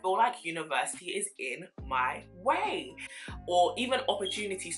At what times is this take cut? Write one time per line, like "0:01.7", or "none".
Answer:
0:03.0